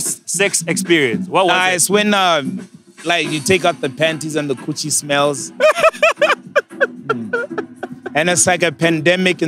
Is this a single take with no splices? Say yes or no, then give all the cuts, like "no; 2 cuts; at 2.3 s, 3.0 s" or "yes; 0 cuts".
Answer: yes; 0 cuts